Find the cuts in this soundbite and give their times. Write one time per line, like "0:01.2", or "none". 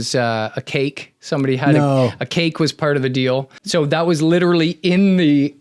0:03.6